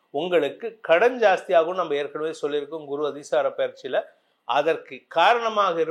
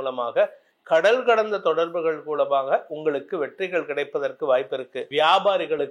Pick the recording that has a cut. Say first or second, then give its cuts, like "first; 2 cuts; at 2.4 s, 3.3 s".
second; 1 cut; at 5.0 s